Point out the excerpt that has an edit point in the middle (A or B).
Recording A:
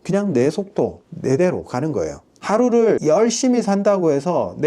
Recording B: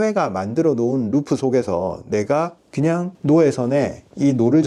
A